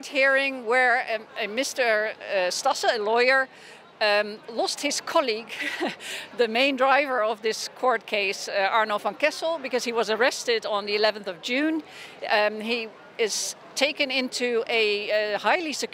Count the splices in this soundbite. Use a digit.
0